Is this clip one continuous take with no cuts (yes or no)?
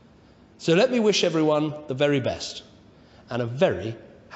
no